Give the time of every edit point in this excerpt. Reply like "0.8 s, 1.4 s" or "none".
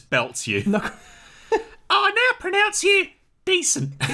none